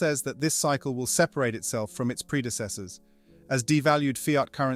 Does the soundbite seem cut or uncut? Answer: uncut